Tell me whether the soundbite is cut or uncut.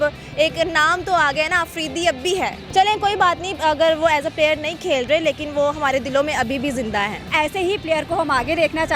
uncut